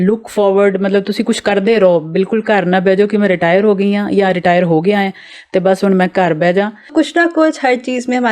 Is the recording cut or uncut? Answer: cut